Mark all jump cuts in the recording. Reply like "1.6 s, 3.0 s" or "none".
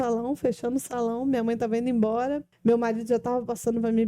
2.5 s